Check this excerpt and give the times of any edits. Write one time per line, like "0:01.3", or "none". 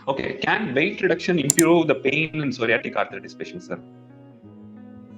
none